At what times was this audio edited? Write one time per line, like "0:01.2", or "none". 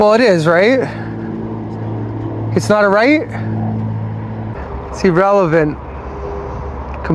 0:04.5